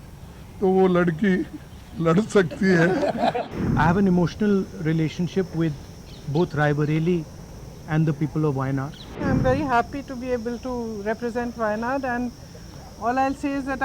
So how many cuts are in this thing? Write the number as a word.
two